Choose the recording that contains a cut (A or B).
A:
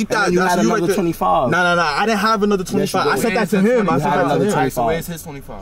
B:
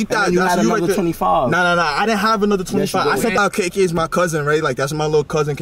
B